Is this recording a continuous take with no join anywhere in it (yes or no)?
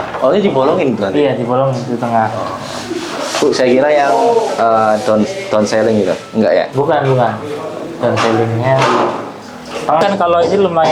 no